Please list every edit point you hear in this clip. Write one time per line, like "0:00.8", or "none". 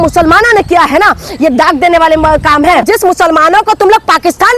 0:02.9